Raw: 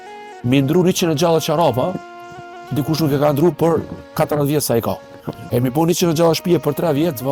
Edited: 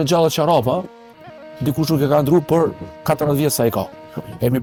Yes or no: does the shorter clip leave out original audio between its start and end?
no